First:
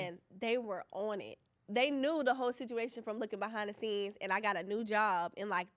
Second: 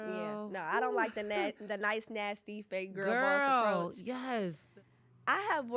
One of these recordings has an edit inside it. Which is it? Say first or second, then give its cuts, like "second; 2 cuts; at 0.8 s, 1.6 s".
second; 1 cut; at 4.6 s